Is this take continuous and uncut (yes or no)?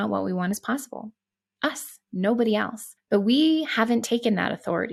yes